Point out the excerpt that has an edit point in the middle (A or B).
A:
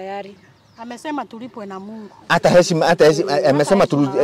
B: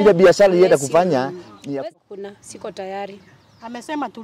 B